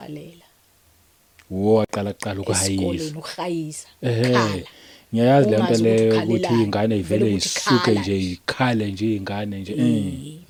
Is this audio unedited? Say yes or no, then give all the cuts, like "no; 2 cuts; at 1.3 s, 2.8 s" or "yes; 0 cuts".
yes; 0 cuts